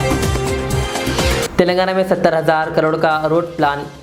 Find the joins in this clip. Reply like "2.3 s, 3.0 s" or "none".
none